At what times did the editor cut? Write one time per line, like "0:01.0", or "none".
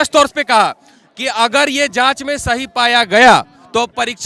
none